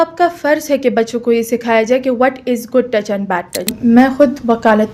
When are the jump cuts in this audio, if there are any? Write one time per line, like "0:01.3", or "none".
0:03.7